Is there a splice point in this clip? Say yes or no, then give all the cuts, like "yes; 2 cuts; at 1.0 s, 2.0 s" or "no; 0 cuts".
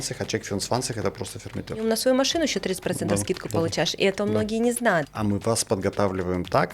yes; 2 cuts; at 1.8 s, 5.0 s